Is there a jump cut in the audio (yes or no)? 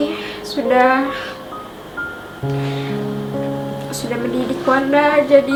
no